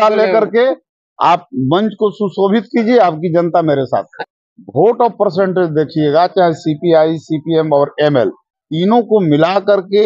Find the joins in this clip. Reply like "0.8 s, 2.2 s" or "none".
4.1 s